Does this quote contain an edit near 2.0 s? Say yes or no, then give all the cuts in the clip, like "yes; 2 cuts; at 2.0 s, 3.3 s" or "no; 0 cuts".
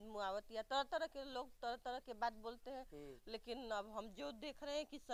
no; 0 cuts